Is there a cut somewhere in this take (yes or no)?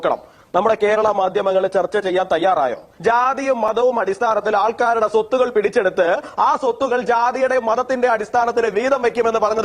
yes